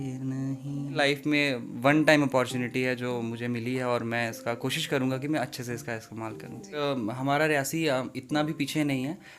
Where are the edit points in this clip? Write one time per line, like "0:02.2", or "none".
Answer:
0:00.9
0:06.8